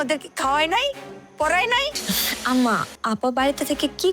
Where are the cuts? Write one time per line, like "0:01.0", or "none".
0:02.0
0:02.9